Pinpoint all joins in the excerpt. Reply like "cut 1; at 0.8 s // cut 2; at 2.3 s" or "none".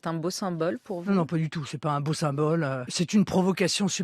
cut 1; at 2.9 s